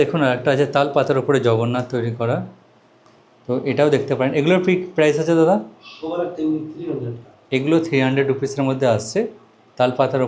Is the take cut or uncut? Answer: uncut